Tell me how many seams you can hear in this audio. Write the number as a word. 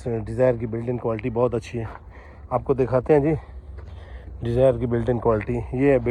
zero